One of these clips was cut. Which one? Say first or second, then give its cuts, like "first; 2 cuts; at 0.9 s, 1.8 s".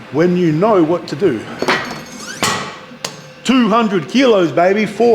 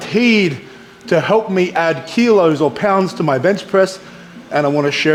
first; 1 cut; at 2.0 s